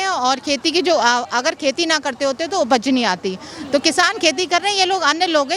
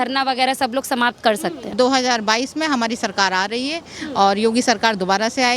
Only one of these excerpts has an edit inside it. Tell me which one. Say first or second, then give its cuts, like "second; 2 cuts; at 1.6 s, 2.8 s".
second; 1 cut; at 1.7 s